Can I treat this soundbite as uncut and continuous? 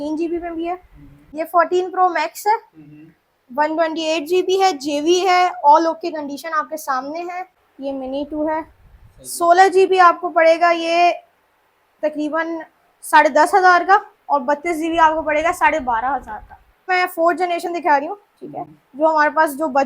no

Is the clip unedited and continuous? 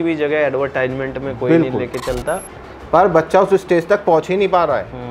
no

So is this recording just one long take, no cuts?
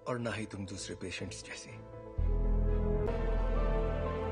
no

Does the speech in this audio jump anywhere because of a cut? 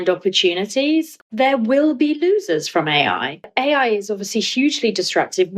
yes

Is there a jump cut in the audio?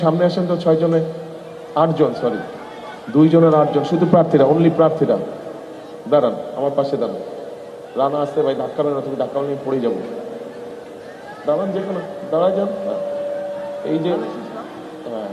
no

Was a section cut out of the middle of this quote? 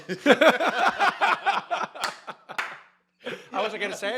no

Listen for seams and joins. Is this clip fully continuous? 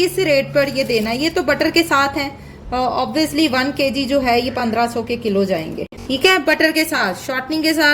no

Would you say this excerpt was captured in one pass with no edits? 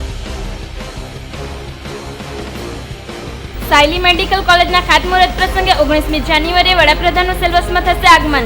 no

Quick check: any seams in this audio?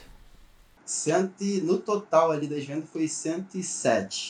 no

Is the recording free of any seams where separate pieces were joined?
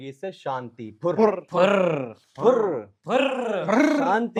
yes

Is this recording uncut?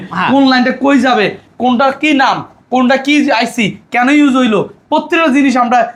yes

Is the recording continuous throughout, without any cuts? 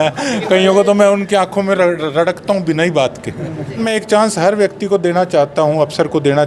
no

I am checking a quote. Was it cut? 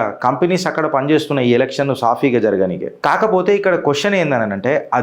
yes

